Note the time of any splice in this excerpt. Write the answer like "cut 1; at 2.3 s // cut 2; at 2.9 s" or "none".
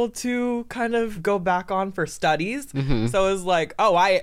cut 1; at 1.2 s

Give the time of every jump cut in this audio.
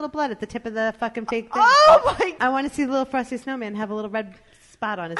cut 1; at 2.3 s

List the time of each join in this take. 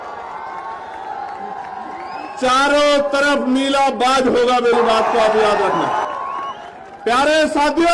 cut 1; at 6.0 s

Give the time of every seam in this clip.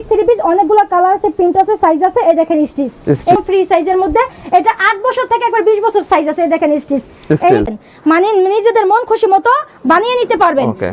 cut 1; at 3.4 s // cut 2; at 7.7 s

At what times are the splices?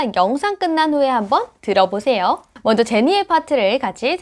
cut 1; at 2.5 s

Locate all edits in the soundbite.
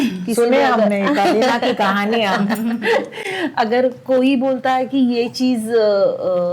none

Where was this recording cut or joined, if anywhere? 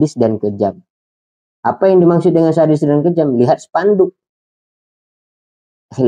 none

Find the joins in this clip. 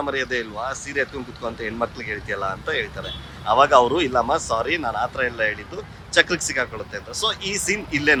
none

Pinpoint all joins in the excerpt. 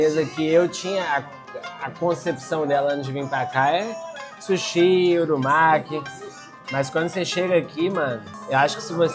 none

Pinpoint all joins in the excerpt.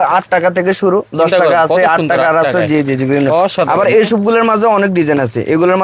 none

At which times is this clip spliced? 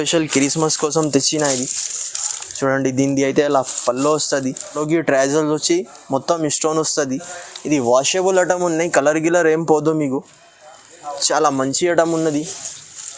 cut 1; at 4.8 s

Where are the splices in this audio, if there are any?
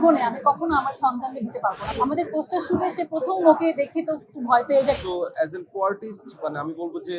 cut 1; at 1.9 s // cut 2; at 5.0 s

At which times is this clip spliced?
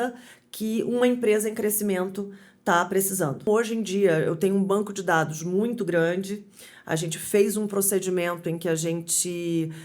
cut 1; at 3.5 s

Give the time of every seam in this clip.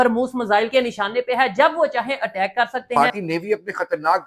cut 1; at 3.0 s

